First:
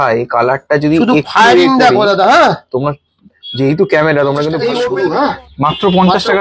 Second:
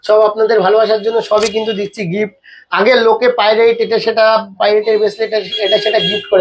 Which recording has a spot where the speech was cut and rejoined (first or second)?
first